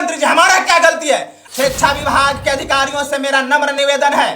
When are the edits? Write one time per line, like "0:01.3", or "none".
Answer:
0:01.3